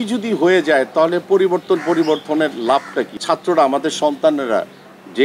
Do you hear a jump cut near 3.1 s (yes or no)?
yes